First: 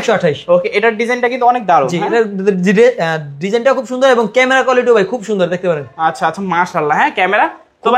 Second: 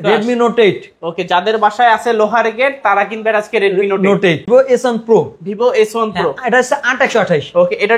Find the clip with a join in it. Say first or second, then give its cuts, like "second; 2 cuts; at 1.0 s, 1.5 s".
second; 1 cut; at 4.5 s